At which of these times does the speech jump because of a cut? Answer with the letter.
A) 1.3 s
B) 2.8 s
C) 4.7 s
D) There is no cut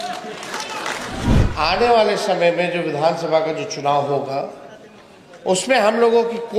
A